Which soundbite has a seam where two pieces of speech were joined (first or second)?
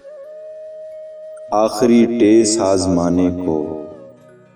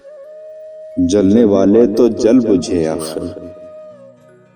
first